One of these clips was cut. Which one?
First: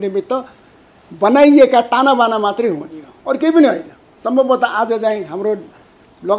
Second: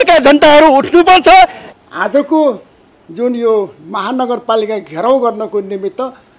second; 1 cut; at 1.6 s

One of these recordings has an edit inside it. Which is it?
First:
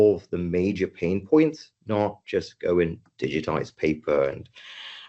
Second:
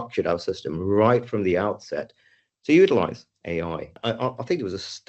second; 1 cut; at 3.9 s

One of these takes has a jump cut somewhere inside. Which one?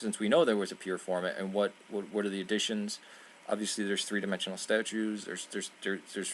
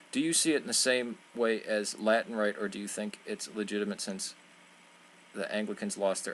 second; 1 cut; at 3.2 s

